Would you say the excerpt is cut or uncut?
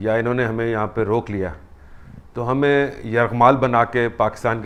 uncut